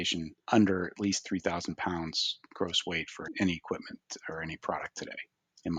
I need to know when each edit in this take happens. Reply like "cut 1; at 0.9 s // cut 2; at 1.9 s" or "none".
none